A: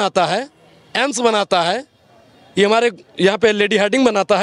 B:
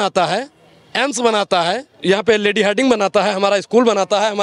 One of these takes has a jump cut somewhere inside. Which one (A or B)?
B